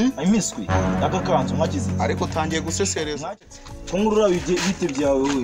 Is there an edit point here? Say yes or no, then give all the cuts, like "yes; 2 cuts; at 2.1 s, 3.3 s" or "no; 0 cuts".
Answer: yes; 1 cut; at 3.6 s